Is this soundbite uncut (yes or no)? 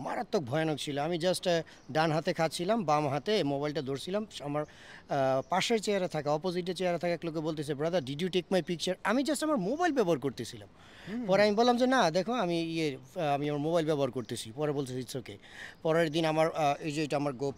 yes